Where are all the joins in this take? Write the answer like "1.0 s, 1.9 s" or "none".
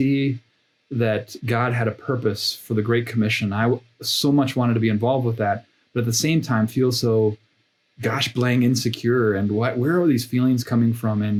none